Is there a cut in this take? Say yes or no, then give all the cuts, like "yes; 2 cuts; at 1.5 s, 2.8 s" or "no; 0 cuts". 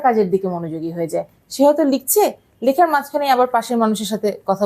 no; 0 cuts